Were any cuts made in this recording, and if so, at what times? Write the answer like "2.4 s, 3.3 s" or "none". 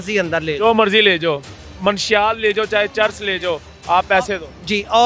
none